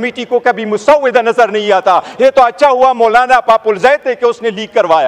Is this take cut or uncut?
uncut